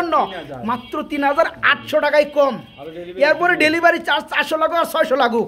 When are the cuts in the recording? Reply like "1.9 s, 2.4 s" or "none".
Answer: none